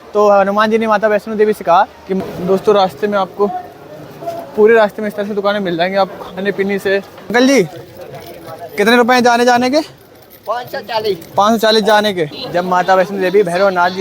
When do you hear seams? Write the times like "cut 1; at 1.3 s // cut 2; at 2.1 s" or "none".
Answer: cut 1; at 2.2 s // cut 2; at 7.3 s // cut 3; at 12.3 s